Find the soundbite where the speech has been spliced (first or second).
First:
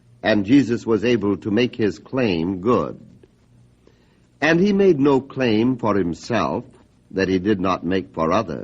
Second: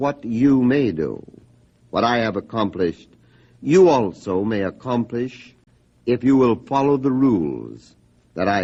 first